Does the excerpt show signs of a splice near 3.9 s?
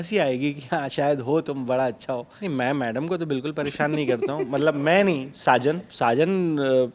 no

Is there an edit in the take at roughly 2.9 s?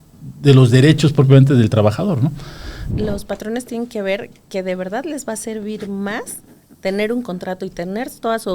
yes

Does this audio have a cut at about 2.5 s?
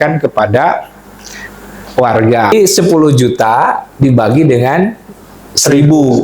yes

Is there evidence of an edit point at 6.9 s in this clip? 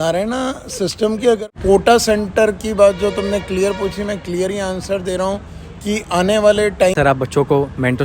yes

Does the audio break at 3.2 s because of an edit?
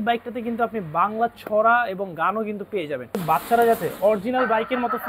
yes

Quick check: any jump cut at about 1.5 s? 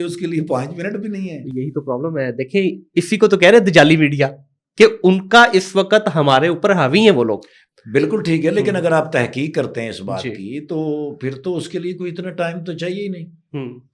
no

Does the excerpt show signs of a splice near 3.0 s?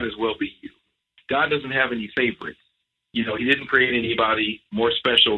no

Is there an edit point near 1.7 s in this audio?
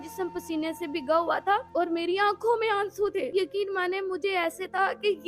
yes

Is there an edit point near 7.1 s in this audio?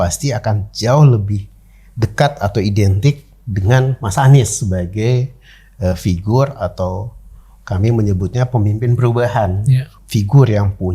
no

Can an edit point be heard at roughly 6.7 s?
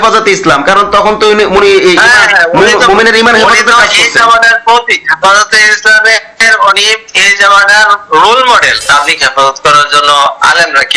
no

